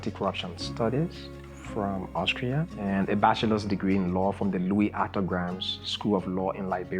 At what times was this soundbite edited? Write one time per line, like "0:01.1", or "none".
0:02.8